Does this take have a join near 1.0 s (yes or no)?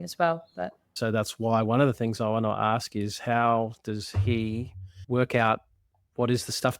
yes